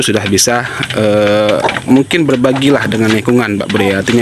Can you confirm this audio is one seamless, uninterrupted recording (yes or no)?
yes